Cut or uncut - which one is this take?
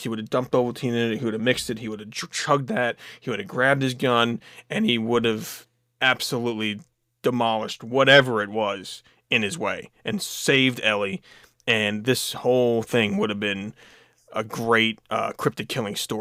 uncut